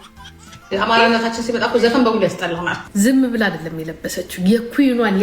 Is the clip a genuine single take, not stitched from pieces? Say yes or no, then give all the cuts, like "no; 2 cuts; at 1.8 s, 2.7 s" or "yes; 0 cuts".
no; 1 cut; at 2.9 s